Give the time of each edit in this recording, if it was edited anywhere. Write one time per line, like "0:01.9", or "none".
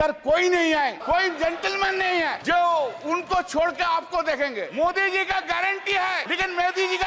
0:01.0
0:02.4
0:04.7
0:06.3